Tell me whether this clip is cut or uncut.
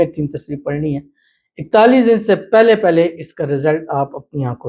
uncut